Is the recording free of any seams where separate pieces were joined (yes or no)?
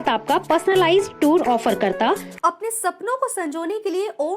no